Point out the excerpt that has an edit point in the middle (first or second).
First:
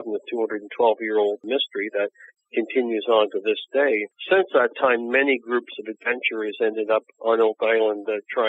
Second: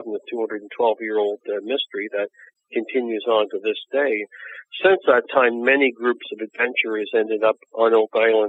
first